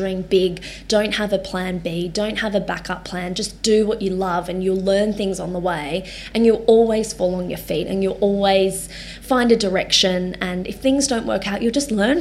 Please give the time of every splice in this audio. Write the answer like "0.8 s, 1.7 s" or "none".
none